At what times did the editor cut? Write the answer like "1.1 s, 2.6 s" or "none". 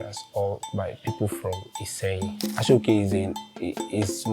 2.5 s

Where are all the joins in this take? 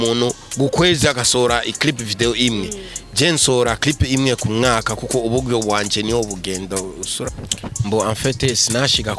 7.2 s

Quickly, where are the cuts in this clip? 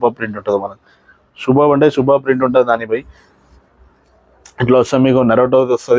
none

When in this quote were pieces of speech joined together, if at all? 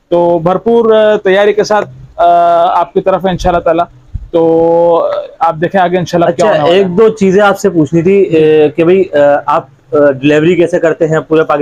none

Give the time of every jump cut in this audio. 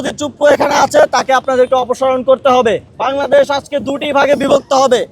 2.9 s

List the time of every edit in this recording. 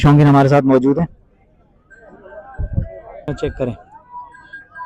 3.3 s

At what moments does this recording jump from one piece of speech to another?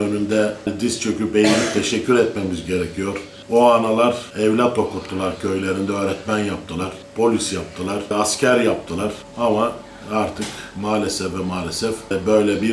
3.3 s, 4.3 s, 7.0 s

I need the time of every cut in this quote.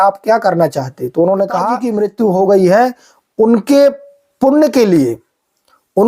1.9 s

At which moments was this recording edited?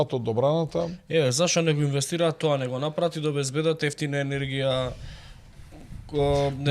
none

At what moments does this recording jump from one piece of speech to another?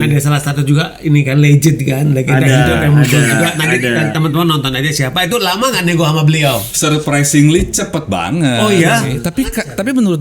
6.7 s, 9.2 s

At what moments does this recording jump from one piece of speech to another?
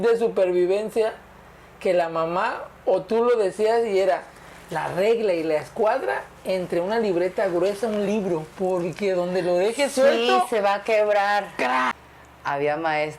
11.9 s

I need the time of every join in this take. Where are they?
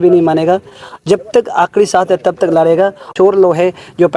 3.1 s

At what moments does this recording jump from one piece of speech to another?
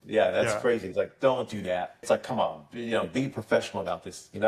2.0 s

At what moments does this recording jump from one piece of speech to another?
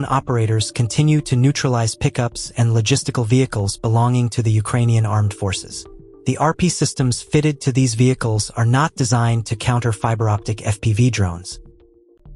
11.5 s

